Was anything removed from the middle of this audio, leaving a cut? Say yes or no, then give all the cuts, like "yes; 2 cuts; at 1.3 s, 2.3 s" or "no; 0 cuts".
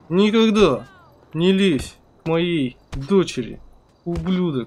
no; 0 cuts